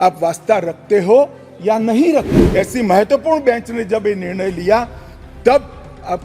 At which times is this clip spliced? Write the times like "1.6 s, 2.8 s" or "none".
2.4 s